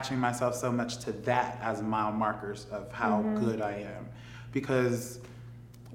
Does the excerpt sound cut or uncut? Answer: uncut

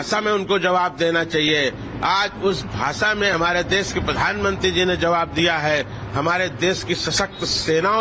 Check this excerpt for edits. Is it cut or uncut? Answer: uncut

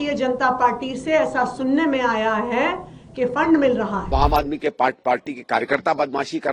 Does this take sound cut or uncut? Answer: cut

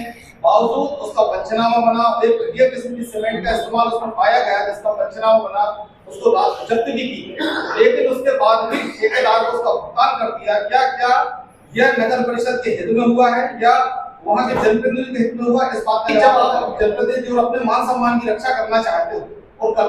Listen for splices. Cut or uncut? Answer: cut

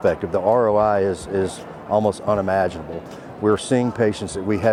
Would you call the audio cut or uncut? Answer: uncut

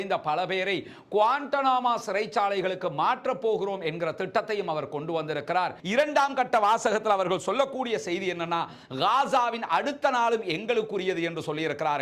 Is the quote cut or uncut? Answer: cut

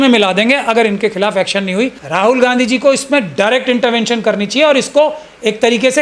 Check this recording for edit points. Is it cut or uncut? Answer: cut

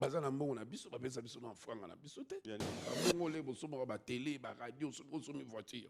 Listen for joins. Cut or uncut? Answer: cut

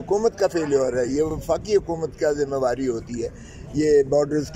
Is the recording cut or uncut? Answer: uncut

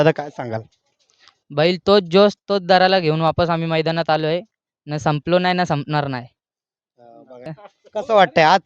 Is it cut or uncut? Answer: cut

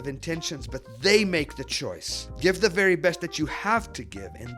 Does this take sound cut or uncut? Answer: cut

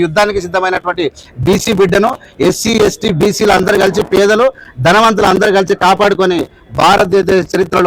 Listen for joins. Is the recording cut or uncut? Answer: uncut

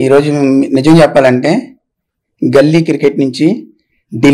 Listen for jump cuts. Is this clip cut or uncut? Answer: uncut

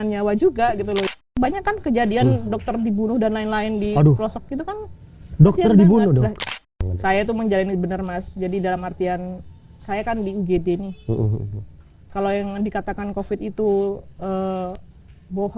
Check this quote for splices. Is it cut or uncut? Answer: cut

